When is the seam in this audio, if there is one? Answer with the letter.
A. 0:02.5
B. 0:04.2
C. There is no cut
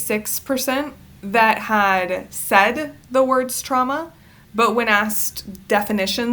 C